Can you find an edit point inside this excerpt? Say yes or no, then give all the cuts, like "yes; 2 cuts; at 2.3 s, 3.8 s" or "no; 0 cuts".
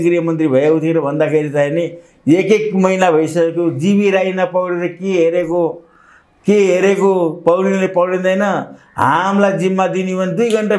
no; 0 cuts